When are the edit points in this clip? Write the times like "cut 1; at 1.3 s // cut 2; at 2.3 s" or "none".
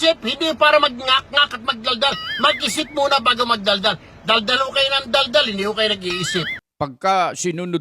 cut 1; at 6.6 s